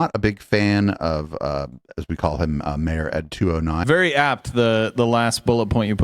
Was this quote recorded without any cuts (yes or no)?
no